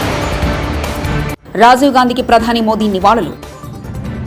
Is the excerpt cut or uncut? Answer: uncut